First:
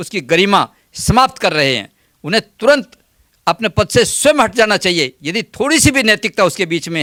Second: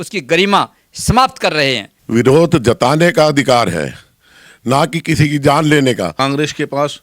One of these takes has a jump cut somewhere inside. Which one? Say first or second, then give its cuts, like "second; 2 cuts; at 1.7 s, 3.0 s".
second; 2 cuts; at 1.9 s, 6.1 s